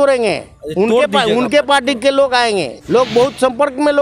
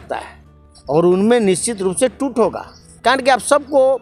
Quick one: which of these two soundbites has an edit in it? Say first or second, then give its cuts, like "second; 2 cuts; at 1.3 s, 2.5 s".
first; 1 cut; at 2.7 s